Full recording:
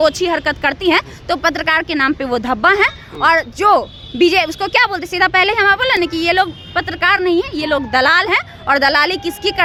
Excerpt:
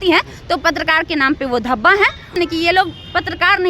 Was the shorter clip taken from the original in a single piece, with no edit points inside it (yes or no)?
no